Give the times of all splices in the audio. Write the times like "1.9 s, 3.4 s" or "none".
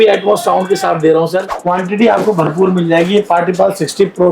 1.5 s